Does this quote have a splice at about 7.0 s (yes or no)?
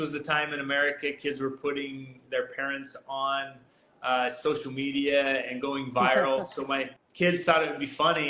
yes